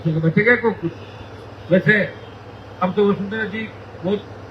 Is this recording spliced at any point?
no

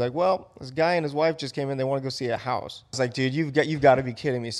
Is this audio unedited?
no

